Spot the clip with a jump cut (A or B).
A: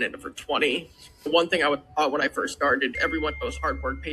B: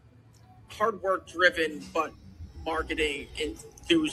A